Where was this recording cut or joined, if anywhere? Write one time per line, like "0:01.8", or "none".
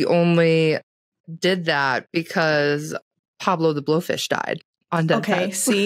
none